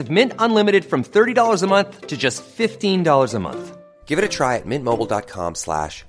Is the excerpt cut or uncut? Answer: uncut